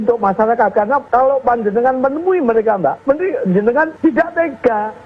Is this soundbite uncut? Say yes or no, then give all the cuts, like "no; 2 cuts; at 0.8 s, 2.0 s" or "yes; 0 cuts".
no; 3 cuts; at 1.0 s, 3.0 s, 3.9 s